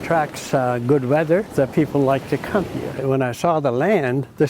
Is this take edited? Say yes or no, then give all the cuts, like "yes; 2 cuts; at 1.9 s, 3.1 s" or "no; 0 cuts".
yes; 1 cut; at 3.0 s